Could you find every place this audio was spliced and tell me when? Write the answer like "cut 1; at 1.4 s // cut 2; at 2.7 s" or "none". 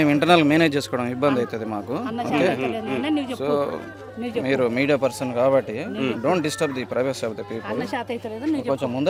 none